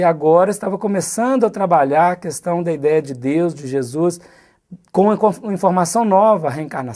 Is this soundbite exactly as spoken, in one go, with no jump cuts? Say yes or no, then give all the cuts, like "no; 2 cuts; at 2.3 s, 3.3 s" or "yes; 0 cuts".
yes; 0 cuts